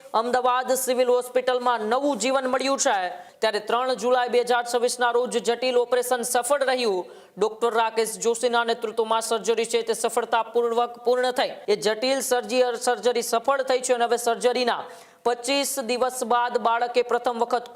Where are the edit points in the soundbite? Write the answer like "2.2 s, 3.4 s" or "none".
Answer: 3.2 s, 11.6 s